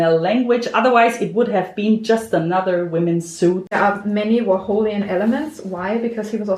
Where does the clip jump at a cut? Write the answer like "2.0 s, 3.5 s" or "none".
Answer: 3.8 s